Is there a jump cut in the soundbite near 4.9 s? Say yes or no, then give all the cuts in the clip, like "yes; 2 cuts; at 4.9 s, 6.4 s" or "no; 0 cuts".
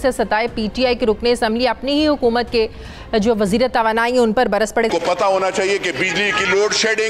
yes; 1 cut; at 4.9 s